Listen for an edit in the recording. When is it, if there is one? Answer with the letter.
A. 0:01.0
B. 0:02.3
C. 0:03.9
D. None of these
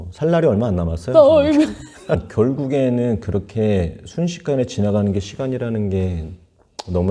B